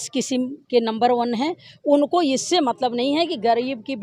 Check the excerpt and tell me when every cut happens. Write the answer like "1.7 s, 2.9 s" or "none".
none